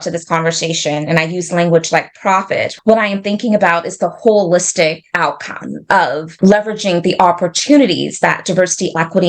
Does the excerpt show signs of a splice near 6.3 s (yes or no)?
yes